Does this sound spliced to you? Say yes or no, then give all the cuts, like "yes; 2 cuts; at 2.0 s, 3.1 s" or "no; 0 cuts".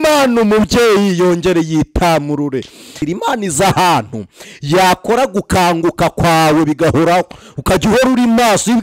yes; 1 cut; at 3.0 s